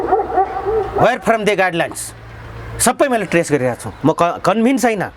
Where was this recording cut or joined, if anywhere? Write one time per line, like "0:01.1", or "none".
0:03.9